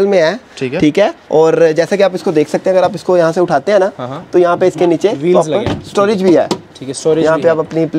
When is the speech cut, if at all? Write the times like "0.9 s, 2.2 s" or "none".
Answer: none